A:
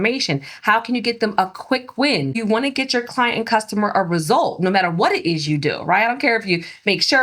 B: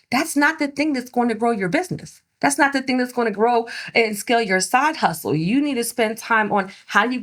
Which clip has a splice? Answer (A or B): A